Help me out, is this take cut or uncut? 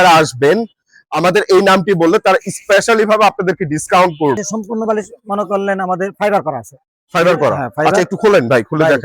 cut